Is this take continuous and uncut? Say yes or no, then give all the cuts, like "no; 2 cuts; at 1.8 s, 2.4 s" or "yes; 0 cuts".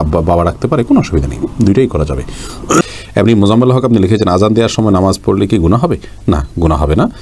yes; 0 cuts